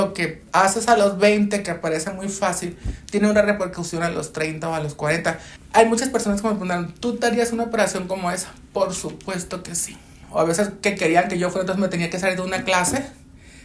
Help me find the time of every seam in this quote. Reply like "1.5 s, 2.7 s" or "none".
5.5 s, 10.1 s